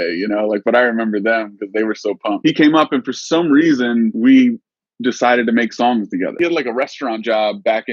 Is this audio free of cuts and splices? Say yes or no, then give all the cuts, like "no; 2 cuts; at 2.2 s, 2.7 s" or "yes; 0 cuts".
no; 3 cuts; at 2.4 s, 4.1 s, 6.3 s